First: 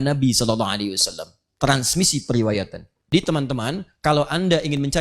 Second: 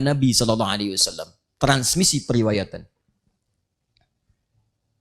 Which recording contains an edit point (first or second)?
first